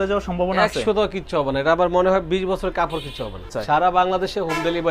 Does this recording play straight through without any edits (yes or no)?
no